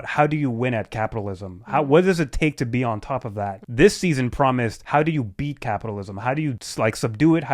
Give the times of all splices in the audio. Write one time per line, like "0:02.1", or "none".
0:03.6
0:04.8
0:06.6